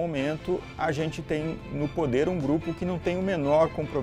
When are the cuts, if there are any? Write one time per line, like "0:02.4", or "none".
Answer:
none